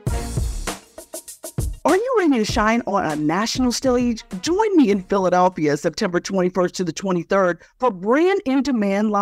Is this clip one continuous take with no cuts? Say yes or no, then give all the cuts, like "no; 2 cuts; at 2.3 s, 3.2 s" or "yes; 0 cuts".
no; 1 cut; at 1.8 s